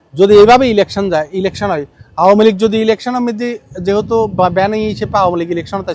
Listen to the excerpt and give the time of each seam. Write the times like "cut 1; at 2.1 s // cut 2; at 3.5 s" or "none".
none